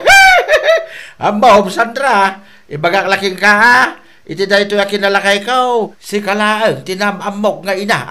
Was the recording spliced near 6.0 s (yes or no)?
yes